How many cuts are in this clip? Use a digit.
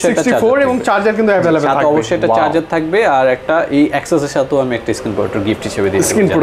0